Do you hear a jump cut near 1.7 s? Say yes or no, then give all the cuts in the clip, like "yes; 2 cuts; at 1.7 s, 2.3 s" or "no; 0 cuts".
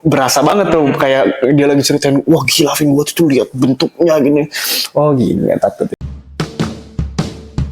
no; 1 cut; at 5.9 s